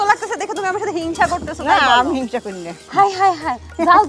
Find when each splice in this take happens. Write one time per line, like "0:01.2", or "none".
0:02.8